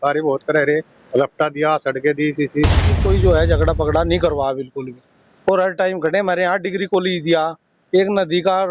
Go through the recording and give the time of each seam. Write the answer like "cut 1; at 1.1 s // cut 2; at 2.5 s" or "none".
cut 1; at 2.9 s